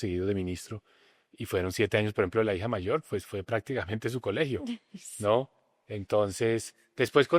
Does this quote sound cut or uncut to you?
uncut